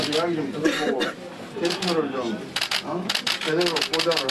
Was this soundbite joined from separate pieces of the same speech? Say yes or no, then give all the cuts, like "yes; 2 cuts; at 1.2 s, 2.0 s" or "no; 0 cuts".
no; 0 cuts